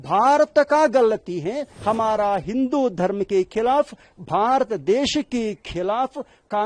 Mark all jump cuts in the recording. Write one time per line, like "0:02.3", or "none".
0:01.7